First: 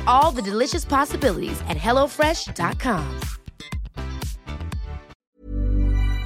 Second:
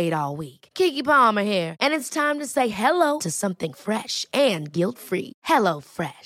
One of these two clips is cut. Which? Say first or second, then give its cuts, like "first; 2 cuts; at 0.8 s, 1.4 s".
first; 1 cut; at 5.2 s